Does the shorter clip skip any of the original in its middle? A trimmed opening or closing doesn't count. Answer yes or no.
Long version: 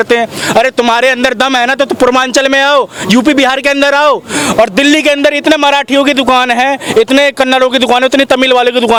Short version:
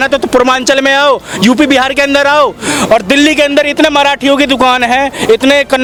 no